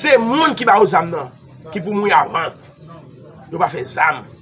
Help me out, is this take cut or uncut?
uncut